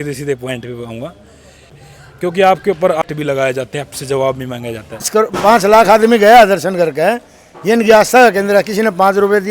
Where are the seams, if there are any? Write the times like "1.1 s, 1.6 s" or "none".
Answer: 1.8 s, 3.0 s, 5.1 s